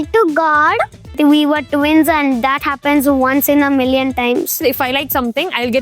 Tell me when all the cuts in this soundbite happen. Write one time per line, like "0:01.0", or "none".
0:01.1
0:04.6